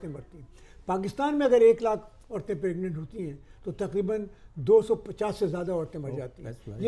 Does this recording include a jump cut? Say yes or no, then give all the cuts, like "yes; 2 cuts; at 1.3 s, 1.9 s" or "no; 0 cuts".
no; 0 cuts